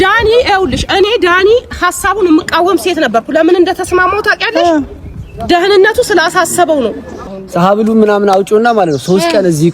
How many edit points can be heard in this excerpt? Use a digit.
1